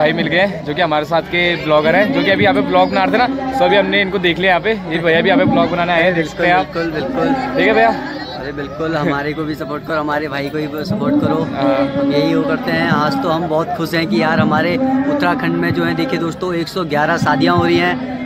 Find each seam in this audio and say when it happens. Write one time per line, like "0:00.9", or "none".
none